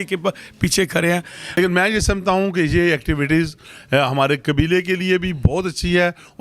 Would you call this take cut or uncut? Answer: cut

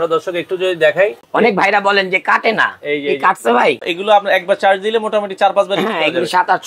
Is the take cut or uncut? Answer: cut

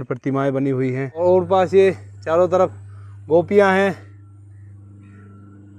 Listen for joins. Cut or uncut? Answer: cut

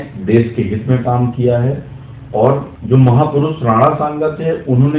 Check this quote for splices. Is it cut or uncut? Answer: cut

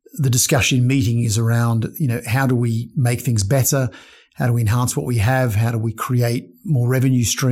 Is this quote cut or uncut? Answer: uncut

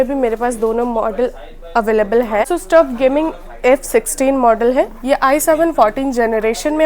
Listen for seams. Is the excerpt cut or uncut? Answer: cut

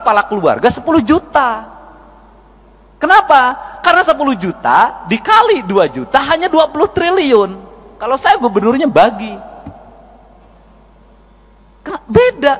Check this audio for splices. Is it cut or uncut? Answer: uncut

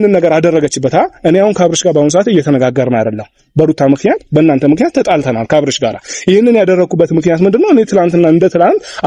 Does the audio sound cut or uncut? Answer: uncut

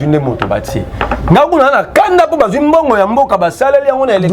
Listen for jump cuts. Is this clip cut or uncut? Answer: uncut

